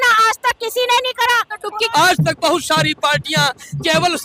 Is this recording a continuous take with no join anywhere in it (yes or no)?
no